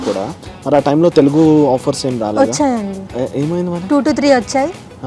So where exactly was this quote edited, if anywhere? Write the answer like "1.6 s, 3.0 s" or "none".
3.0 s